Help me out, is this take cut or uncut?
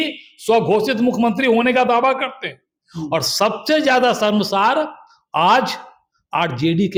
uncut